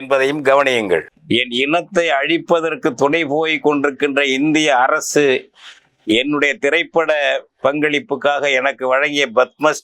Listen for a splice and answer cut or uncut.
cut